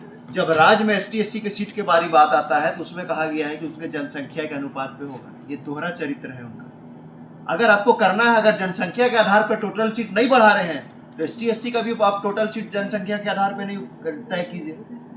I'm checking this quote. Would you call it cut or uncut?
uncut